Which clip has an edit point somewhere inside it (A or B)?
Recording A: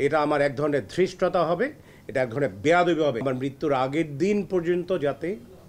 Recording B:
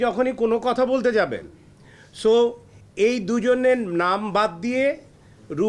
A